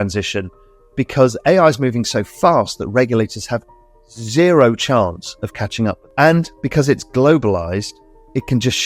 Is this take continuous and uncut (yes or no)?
no